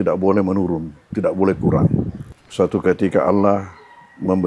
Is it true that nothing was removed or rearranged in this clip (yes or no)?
no